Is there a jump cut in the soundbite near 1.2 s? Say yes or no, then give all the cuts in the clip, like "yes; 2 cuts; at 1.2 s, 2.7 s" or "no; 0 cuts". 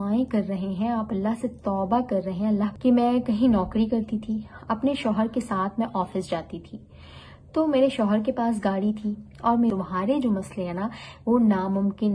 no; 2 cuts; at 2.7 s, 9.7 s